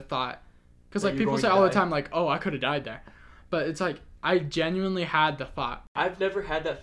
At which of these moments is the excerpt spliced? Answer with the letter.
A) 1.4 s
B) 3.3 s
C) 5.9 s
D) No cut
C